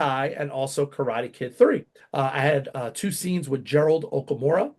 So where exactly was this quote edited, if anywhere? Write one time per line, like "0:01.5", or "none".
0:02.0